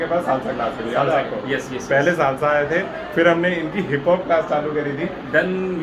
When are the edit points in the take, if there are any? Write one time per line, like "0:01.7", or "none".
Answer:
none